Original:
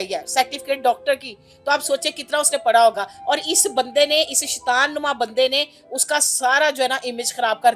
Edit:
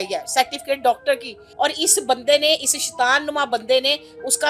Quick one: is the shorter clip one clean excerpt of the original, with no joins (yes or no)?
no